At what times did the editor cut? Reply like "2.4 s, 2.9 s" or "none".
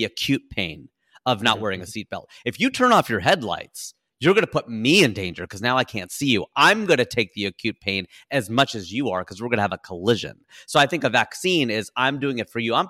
none